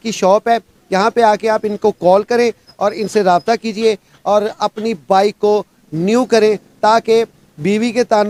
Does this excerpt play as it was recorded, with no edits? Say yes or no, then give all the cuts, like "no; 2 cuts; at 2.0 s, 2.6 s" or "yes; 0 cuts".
yes; 0 cuts